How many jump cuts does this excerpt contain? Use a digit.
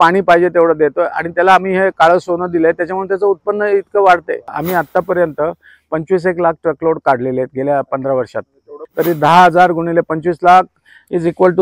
2